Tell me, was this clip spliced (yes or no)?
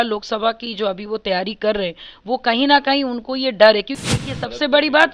yes